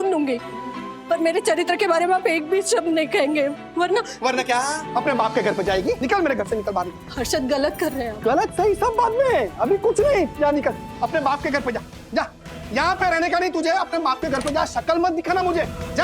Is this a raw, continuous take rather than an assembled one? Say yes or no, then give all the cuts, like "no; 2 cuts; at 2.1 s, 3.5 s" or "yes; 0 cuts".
no; 2 cuts; at 4.8 s, 6.0 s